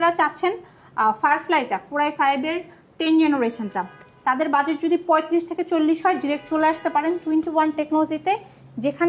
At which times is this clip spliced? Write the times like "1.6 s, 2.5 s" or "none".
none